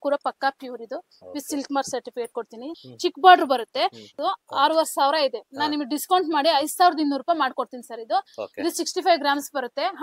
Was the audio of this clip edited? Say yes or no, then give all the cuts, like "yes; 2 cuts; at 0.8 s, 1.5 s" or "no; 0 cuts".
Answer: yes; 1 cut; at 2.9 s